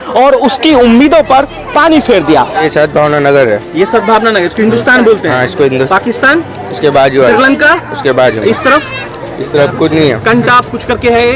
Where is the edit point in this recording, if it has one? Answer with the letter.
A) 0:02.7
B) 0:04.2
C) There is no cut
A